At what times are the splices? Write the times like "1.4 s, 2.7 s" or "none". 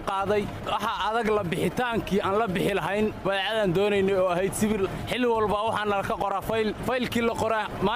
4.9 s, 6.8 s